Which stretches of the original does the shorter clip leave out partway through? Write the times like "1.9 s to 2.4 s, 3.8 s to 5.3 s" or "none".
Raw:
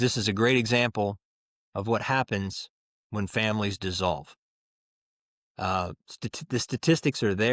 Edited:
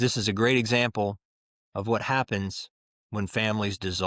none